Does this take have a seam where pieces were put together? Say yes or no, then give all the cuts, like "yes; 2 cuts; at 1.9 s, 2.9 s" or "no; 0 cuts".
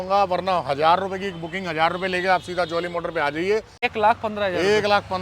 yes; 1 cut; at 3.9 s